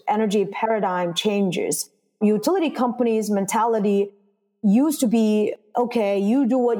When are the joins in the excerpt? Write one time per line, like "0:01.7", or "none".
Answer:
none